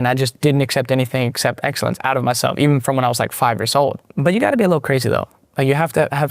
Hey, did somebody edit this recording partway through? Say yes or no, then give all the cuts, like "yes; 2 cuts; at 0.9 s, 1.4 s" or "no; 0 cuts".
yes; 1 cut; at 4.1 s